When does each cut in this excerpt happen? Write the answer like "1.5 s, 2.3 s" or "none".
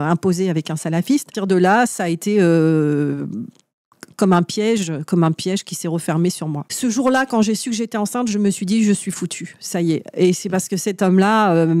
1.3 s, 6.7 s